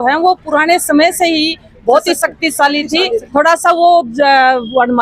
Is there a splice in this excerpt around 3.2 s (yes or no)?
yes